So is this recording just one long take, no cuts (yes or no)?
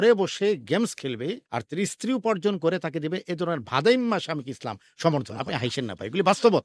no